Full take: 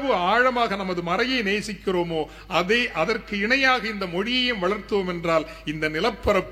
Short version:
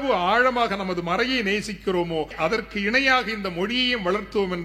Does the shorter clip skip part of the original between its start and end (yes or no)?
yes